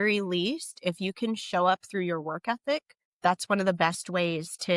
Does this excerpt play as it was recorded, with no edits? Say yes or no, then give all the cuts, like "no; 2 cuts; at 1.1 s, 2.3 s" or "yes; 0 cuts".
no; 1 cut; at 3.0 s